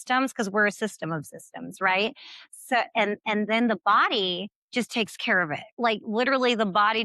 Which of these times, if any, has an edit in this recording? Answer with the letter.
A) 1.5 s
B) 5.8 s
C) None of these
B